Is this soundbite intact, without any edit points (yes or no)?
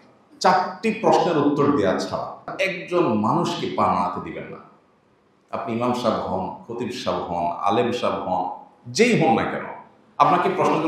no